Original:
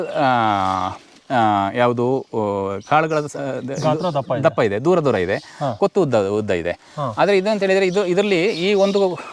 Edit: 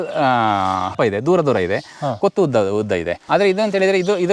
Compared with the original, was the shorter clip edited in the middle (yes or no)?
yes